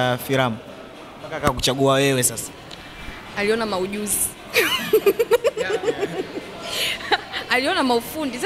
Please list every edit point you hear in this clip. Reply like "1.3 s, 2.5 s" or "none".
none